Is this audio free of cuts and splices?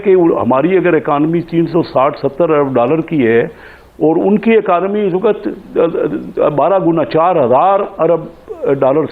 yes; 0 cuts

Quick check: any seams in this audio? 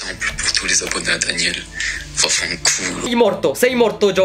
yes; 1 cut; at 3.1 s

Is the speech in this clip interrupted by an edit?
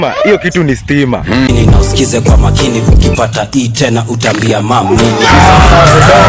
yes; 1 cut; at 1.1 s

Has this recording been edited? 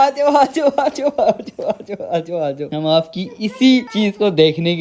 yes; 2 cuts; at 2.7 s, 3.9 s

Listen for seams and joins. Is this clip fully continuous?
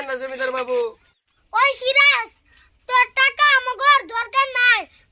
no; 1 cut; at 0.9 s

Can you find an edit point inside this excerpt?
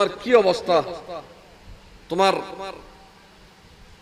no; 0 cuts

